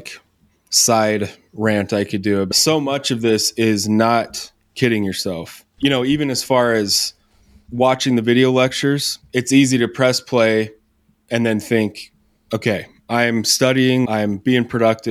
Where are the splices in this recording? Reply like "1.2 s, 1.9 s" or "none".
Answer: 2.5 s, 9.1 s, 14.1 s